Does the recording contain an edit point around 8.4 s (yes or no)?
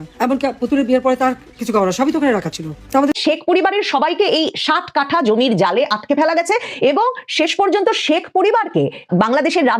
no